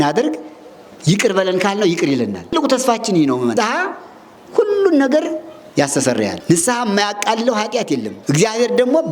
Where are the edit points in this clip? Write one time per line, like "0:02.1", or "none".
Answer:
0:02.5
0:03.5
0:06.4
0:08.1